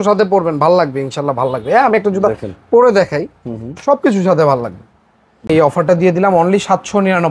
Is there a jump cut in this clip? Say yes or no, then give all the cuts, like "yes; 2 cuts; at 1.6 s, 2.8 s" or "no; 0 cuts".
yes; 1 cut; at 5.5 s